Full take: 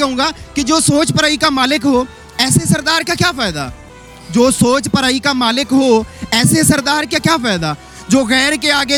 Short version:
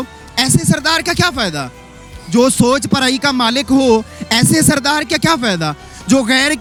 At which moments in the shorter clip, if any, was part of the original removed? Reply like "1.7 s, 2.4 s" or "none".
none